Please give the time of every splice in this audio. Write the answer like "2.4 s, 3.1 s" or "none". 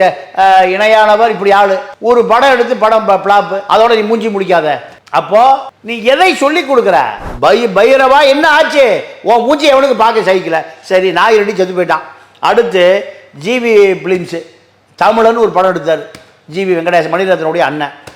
7.2 s